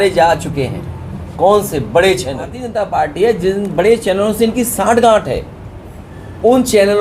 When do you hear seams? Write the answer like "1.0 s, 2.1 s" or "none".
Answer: 2.6 s